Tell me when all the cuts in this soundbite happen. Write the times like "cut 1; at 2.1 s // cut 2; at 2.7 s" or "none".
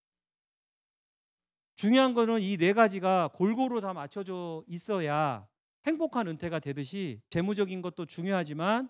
cut 1; at 7.3 s

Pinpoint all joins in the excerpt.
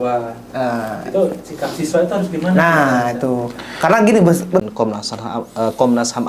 cut 1; at 4.6 s

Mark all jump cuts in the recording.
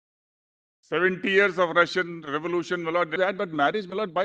cut 1; at 3.1 s

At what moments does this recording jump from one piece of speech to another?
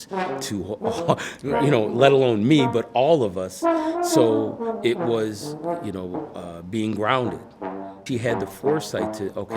cut 1; at 8.0 s

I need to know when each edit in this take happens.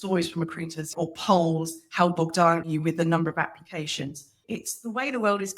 cut 1; at 0.9 s // cut 2; at 2.7 s // cut 3; at 4.4 s

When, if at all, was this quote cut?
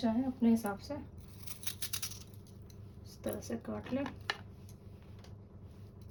none

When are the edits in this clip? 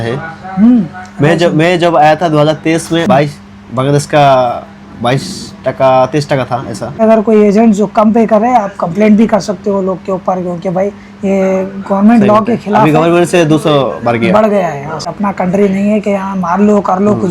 cut 1; at 3.1 s // cut 2; at 7.0 s // cut 3; at 15.1 s

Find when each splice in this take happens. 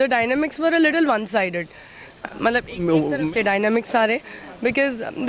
none

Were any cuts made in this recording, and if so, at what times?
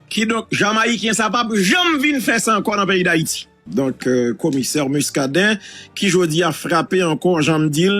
cut 1; at 3.6 s

